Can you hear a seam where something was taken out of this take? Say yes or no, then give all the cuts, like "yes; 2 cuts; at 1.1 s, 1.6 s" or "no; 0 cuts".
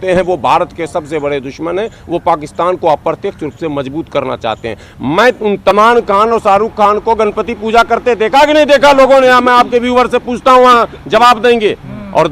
yes; 1 cut; at 5.7 s